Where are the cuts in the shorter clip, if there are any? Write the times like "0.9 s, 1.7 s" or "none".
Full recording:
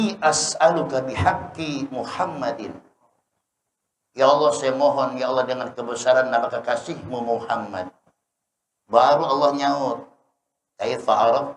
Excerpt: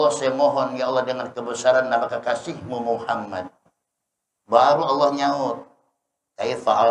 none